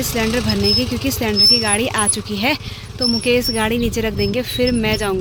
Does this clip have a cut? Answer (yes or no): no